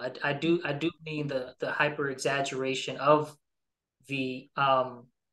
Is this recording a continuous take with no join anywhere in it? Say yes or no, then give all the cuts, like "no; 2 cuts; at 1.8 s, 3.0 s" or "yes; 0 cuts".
yes; 0 cuts